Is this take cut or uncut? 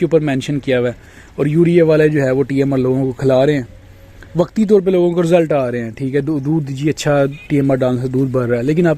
uncut